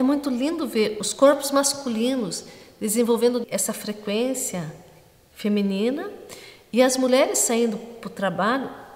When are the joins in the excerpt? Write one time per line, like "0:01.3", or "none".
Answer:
0:01.0
0:03.4